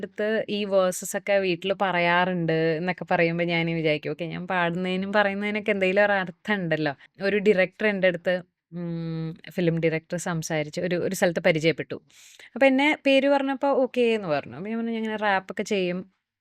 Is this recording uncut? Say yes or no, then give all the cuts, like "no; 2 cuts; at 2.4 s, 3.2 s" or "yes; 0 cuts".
no; 1 cut; at 7.1 s